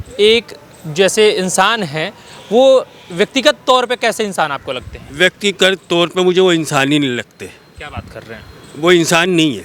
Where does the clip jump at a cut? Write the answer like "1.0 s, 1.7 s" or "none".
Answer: none